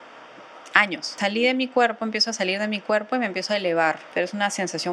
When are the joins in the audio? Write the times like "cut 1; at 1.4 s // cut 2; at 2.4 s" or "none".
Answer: cut 1; at 1.1 s // cut 2; at 4.0 s